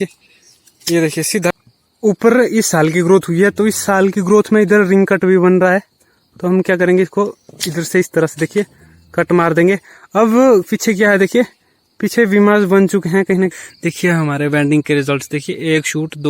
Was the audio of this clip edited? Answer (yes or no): yes